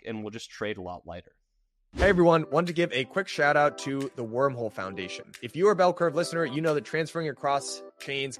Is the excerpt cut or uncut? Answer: cut